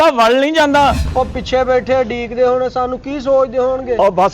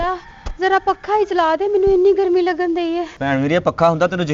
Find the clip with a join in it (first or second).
first